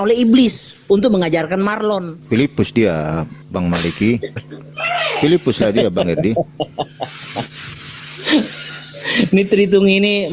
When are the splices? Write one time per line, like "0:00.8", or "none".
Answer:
0:02.1
0:03.4